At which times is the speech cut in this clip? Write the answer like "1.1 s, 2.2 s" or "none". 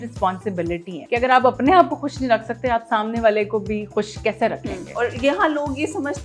0.9 s